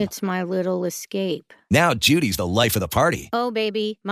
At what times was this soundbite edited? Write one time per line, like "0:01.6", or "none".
none